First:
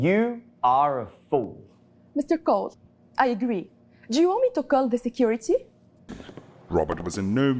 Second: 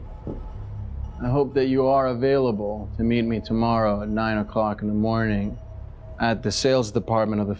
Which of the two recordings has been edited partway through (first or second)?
first